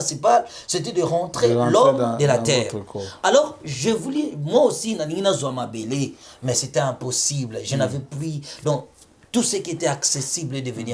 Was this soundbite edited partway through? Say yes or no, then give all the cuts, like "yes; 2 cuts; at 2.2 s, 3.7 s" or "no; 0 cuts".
no; 0 cuts